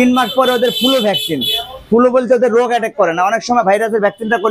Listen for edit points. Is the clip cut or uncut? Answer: uncut